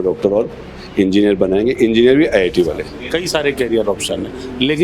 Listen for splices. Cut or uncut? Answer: cut